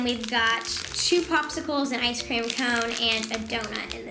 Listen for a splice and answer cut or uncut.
uncut